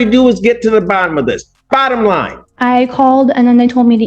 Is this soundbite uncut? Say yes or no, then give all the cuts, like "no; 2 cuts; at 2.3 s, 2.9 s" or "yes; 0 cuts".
no; 1 cut; at 2.4 s